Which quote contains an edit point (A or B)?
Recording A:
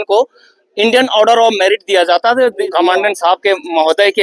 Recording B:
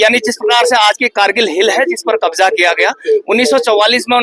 A